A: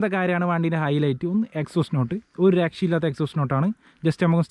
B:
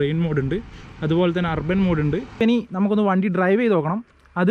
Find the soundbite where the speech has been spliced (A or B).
B